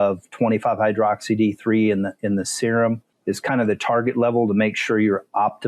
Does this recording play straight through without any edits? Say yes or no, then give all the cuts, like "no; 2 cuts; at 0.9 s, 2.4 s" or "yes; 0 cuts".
no; 1 cut; at 3.1 s